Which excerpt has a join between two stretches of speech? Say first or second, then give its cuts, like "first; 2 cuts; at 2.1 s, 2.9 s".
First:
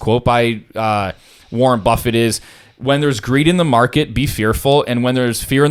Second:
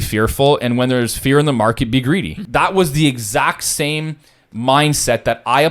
second; 1 cut; at 2.4 s